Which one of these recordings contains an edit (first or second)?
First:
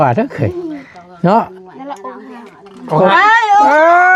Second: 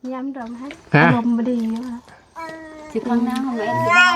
second